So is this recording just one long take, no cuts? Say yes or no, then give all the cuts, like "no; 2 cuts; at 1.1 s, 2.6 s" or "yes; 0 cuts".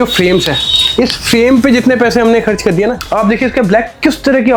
no; 1 cut; at 2.9 s